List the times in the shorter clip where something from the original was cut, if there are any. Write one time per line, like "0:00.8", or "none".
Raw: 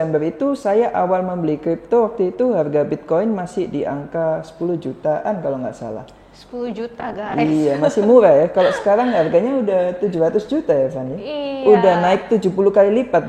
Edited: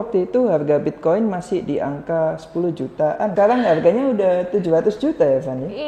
0:03.3